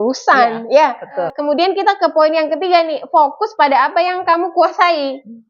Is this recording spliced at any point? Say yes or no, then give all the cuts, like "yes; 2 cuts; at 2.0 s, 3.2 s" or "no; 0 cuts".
yes; 1 cut; at 1.2 s